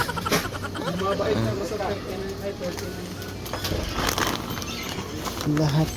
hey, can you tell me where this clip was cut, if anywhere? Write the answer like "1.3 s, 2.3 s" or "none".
none